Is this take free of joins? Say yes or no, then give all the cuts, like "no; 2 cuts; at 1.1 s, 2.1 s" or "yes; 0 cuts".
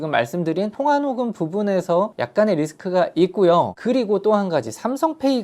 no; 2 cuts; at 2.2 s, 3.8 s